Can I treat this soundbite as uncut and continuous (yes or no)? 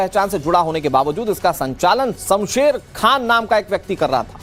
yes